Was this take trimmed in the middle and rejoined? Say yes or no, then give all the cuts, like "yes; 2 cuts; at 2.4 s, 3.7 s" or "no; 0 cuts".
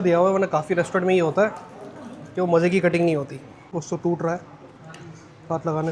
yes; 1 cut; at 3.7 s